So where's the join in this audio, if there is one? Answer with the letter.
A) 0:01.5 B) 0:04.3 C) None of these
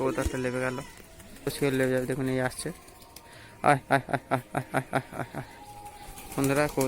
A